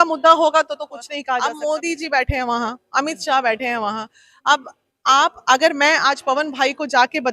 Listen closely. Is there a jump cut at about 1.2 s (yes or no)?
yes